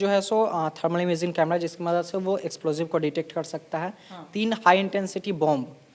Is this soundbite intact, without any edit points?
yes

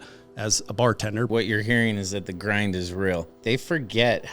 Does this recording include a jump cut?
yes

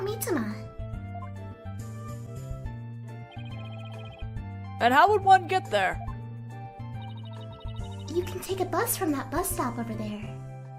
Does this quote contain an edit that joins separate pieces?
yes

